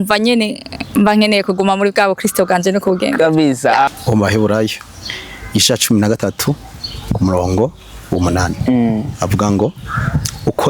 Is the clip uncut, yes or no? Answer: no